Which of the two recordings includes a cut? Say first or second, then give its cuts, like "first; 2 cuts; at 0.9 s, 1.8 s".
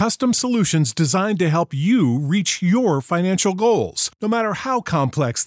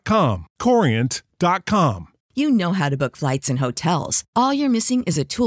second; 1 cut; at 2.2 s